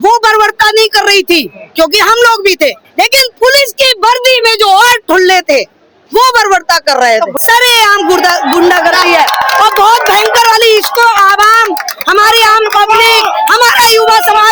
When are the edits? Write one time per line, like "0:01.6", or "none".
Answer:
none